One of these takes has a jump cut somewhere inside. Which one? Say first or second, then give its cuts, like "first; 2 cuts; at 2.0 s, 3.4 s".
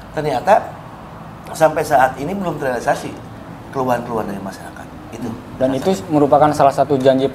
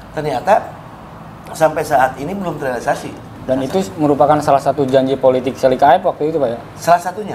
second; 1 cut; at 3.3 s